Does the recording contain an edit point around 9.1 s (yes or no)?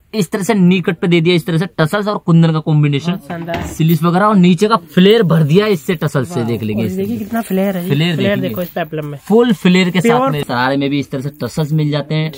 no